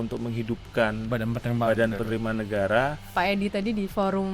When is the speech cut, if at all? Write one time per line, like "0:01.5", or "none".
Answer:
0:03.0